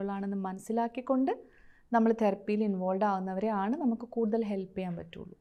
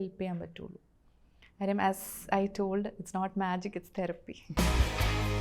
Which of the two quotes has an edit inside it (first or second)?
second